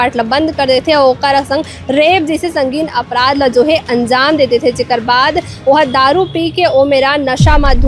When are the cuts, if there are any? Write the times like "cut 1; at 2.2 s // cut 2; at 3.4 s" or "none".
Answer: none